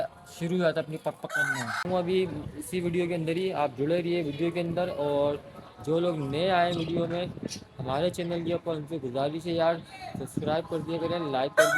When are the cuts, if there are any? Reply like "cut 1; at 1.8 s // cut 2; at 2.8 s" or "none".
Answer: cut 1; at 1.8 s